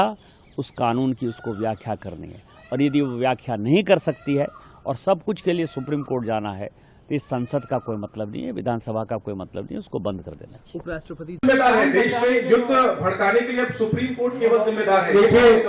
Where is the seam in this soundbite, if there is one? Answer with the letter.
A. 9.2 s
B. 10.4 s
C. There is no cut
C